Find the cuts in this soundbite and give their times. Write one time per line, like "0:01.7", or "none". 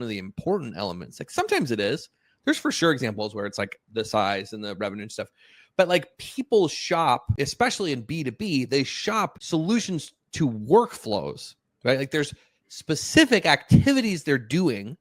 0:07.3
0:09.4